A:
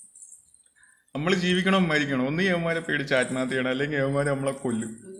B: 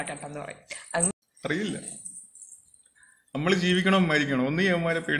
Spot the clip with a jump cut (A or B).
B